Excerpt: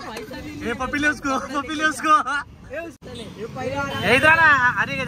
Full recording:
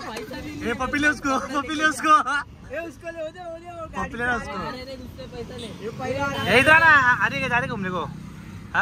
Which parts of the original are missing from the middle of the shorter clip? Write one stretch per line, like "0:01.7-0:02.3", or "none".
0:03.0-0:05.4